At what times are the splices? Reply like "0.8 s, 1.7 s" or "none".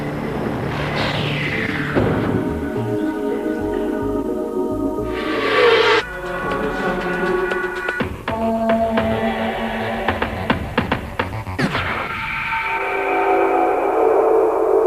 none